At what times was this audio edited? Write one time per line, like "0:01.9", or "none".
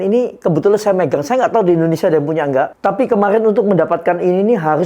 0:02.7